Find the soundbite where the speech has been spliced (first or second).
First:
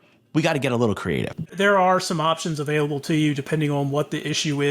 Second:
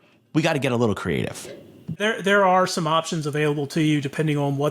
first